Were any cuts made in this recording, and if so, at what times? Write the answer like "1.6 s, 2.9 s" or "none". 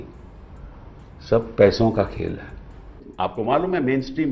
3.3 s